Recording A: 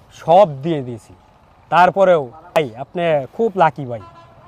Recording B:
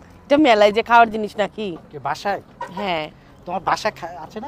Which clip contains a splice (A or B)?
A